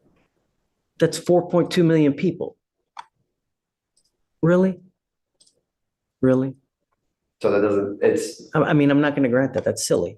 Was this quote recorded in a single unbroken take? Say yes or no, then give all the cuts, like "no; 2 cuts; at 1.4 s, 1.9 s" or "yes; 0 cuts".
yes; 0 cuts